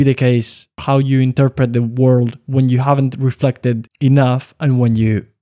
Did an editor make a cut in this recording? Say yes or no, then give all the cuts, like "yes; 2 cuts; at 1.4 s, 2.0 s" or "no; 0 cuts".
yes; 2 cuts; at 0.8 s, 3.9 s